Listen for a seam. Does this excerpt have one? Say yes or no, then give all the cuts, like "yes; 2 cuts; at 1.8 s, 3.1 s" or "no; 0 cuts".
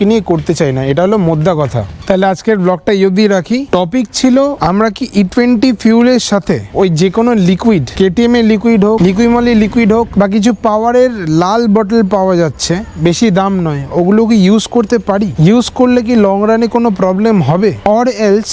no; 0 cuts